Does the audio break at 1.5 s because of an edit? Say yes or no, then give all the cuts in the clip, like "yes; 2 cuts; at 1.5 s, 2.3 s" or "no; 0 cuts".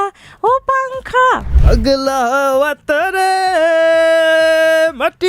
yes; 1 cut; at 1.5 s